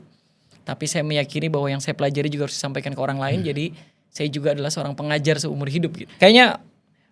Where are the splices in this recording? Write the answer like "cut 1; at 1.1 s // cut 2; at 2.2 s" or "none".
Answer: cut 1; at 6.1 s